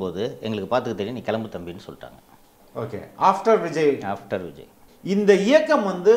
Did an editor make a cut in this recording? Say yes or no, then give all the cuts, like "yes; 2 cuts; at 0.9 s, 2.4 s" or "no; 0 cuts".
yes; 1 cut; at 4.9 s